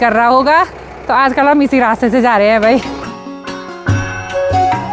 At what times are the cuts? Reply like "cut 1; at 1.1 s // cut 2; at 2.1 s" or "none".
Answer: none